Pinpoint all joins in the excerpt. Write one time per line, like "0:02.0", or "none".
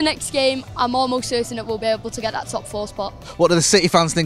0:03.2

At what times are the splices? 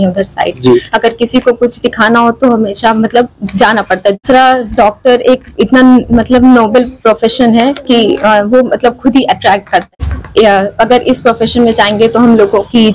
0:04.2
0:10.0

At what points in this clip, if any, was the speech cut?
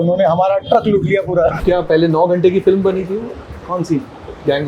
0:01.6

